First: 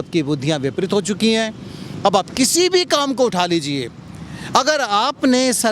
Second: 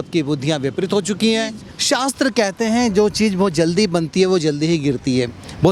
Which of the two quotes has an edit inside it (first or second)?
second